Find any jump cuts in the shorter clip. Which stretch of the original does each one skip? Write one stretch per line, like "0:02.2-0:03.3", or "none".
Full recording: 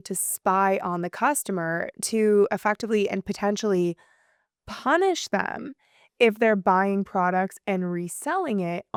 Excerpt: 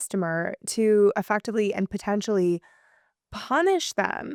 none